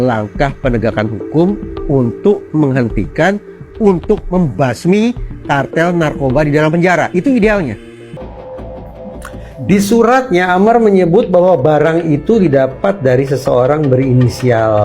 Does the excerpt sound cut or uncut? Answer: cut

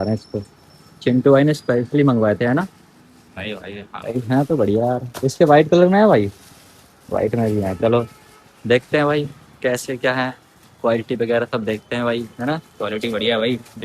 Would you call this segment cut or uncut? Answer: uncut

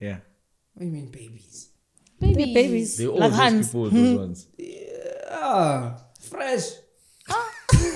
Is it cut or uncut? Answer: uncut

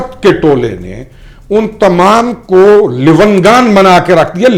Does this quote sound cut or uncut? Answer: uncut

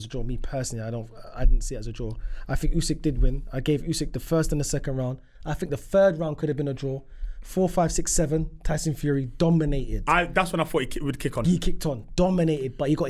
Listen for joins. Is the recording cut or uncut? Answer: uncut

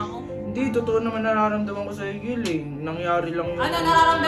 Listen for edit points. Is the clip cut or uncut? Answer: uncut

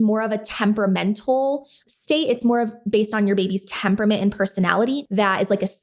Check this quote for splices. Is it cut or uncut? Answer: cut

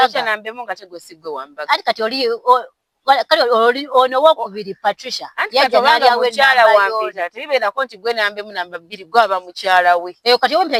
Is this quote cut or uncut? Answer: uncut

